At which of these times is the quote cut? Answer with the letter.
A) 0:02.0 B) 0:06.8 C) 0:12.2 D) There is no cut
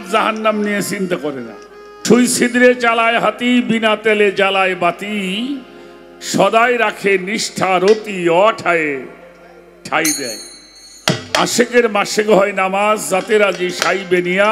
A